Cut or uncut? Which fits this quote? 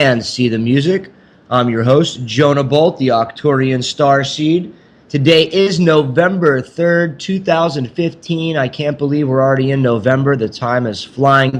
cut